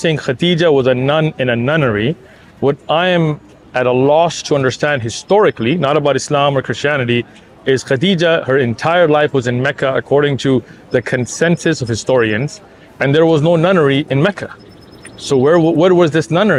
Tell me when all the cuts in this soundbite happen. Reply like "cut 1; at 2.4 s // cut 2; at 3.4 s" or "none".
none